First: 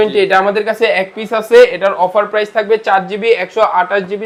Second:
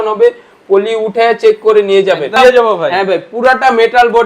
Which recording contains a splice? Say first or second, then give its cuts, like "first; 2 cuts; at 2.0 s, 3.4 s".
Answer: second; 1 cut; at 2.4 s